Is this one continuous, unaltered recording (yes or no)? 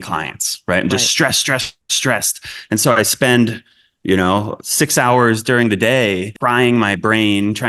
no